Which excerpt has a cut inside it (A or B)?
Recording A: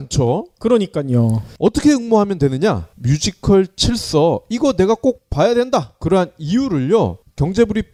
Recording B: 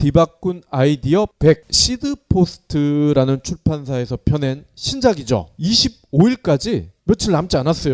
B